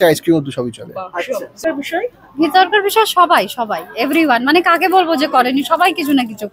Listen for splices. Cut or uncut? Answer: cut